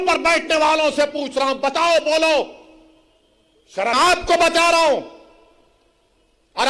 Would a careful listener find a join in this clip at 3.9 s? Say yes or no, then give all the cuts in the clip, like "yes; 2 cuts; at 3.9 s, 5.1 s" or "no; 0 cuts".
yes; 1 cut; at 3.9 s